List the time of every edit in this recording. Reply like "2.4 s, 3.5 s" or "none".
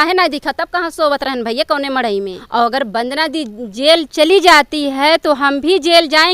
2.4 s